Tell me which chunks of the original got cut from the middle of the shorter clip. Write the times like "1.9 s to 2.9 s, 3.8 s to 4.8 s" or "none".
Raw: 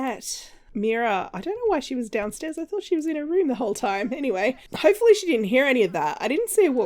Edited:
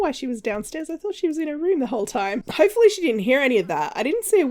4.1 s to 4.7 s